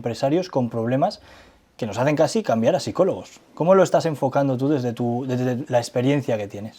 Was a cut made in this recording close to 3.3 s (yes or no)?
no